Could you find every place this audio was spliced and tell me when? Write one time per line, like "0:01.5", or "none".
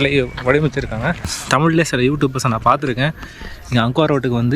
0:01.4